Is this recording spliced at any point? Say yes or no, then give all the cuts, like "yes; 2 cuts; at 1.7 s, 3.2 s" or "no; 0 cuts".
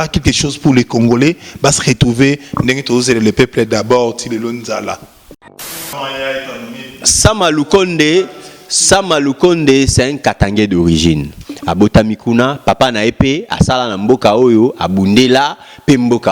yes; 1 cut; at 5.5 s